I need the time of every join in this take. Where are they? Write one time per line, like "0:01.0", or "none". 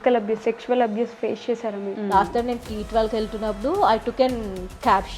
0:01.9